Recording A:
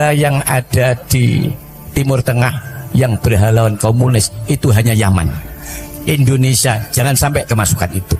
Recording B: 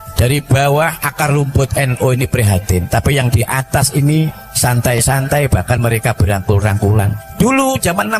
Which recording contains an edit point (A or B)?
B